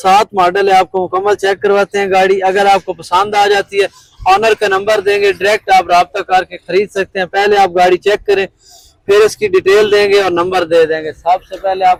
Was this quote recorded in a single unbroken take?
yes; 0 cuts

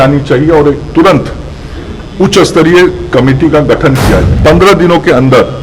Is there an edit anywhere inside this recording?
yes; 1 cut; at 4.3 s

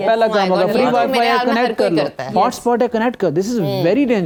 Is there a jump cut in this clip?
no; 0 cuts

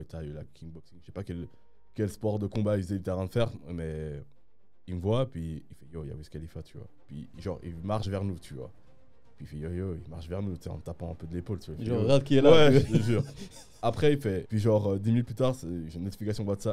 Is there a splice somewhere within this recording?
yes; 1 cut; at 14.5 s

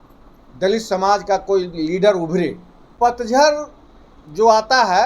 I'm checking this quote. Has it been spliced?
yes; 1 cut; at 2.8 s

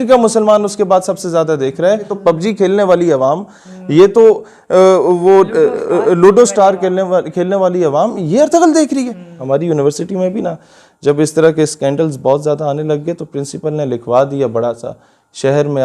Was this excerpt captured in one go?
no; 2 cuts; at 2.1 s, 9.3 s

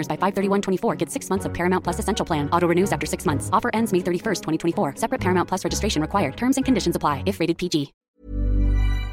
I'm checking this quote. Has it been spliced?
yes; 1 cut; at 8.0 s

